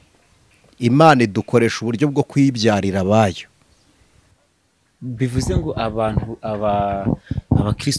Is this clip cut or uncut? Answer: uncut